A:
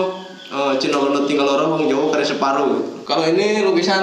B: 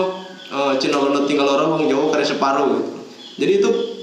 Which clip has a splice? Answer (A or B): A